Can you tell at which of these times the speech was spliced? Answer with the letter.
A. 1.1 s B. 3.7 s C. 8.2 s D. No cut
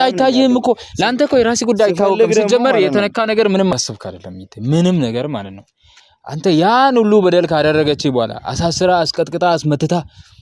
B